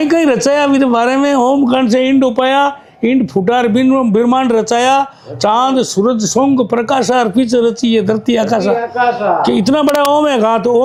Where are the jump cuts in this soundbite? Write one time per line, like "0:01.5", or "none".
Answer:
none